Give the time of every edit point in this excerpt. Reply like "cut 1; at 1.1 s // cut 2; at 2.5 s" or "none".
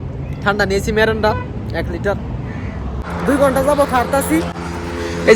cut 1; at 3.0 s